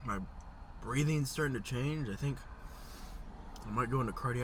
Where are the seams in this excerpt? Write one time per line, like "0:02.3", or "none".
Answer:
none

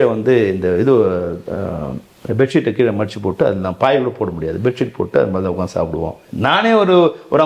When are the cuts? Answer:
0:06.2

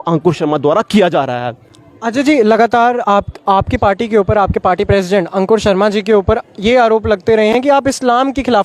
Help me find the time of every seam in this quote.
none

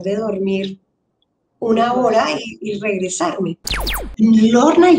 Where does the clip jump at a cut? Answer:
0:03.8

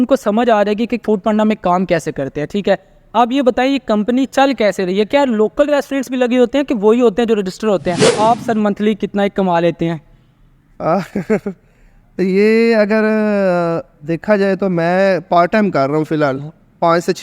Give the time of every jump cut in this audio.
0:08.1

